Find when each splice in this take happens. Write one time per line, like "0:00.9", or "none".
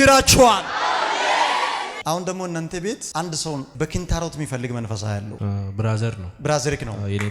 0:01.9